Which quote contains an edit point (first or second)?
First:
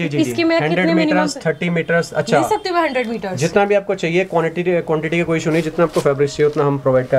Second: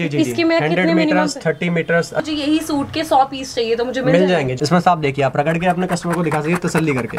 second